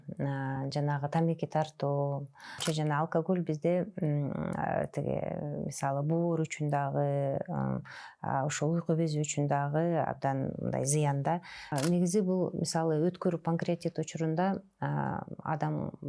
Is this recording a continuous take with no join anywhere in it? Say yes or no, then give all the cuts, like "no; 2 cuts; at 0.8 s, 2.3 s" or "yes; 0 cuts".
no; 2 cuts; at 2.6 s, 11.7 s